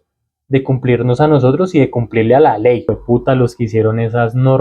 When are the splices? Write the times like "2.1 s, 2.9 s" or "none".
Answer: 2.9 s